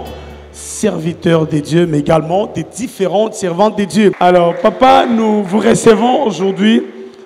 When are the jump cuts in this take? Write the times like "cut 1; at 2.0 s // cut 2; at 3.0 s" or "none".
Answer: cut 1; at 4.2 s